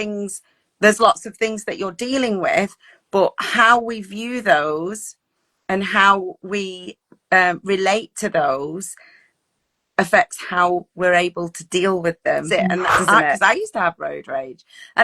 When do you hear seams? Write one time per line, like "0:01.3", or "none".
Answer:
0:12.5